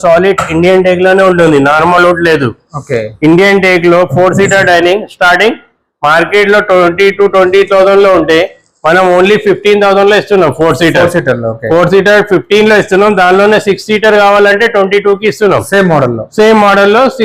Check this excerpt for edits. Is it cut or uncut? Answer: uncut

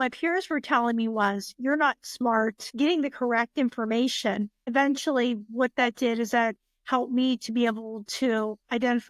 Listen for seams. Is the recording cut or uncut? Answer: cut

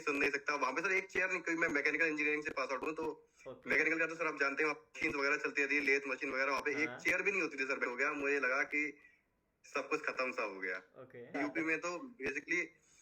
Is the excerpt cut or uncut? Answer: cut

